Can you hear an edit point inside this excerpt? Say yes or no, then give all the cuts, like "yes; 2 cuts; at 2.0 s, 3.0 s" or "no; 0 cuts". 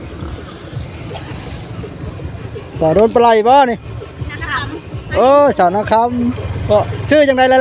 no; 0 cuts